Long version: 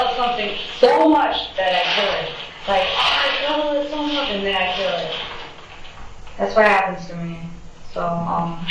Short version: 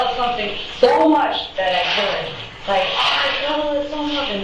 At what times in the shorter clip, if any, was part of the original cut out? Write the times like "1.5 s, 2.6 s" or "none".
none